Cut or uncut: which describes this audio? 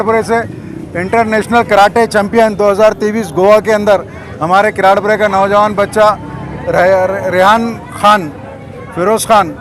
uncut